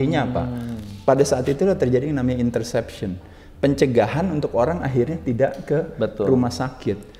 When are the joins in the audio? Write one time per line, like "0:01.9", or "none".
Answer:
none